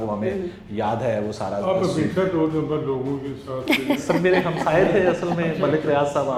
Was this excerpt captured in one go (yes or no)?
yes